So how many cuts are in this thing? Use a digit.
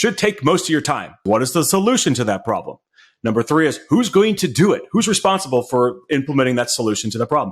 1